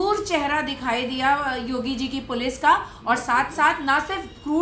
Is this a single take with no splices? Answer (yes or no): yes